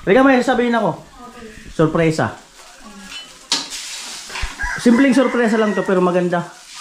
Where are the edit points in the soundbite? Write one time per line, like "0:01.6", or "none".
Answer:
none